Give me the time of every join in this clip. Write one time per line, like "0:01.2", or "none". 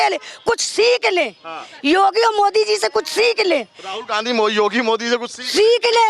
none